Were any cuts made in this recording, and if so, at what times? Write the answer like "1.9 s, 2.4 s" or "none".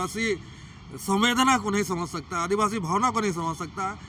none